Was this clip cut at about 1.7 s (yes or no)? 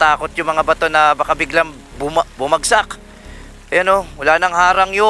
no